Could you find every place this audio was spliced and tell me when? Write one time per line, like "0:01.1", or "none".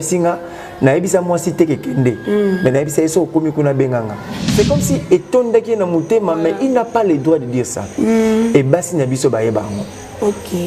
0:04.4